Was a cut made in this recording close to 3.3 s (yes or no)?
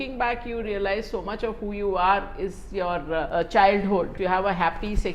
yes